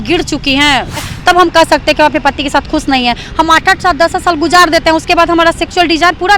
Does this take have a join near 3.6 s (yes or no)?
no